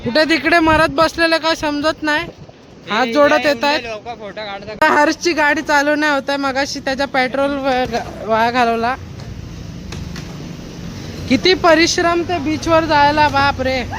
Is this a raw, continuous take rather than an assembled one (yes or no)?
no